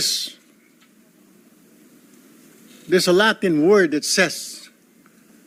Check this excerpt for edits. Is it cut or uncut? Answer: uncut